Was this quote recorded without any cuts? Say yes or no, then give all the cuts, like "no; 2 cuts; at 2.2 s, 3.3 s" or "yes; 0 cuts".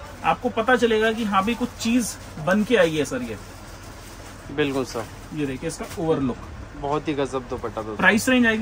yes; 0 cuts